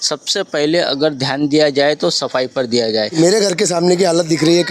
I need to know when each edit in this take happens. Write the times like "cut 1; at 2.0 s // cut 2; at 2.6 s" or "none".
cut 1; at 3.1 s